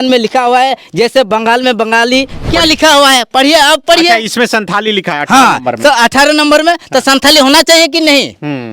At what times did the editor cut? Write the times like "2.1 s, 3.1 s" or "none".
2.4 s